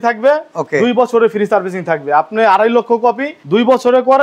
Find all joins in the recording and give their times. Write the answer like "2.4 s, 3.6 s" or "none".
3.3 s